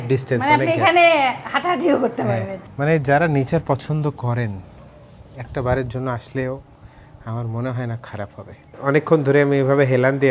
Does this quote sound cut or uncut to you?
cut